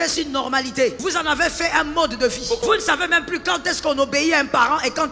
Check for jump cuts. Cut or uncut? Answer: cut